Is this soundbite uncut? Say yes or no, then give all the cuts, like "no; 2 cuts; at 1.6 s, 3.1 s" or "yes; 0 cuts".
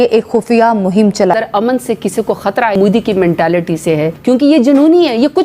no; 3 cuts; at 1.4 s, 2.8 s, 4.1 s